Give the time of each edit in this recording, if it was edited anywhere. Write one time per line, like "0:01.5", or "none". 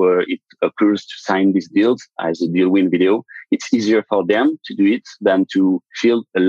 none

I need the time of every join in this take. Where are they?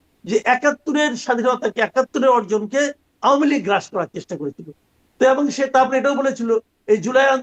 none

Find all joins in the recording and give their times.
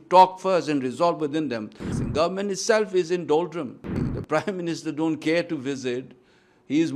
0:01.9
0:04.0

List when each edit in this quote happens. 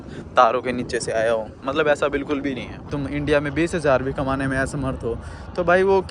0:03.0

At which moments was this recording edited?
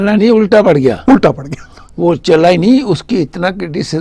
none

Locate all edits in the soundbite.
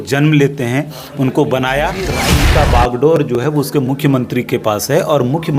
0:02.3

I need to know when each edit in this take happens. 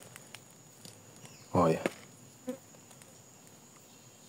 none

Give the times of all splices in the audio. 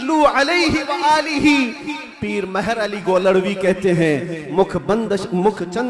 none

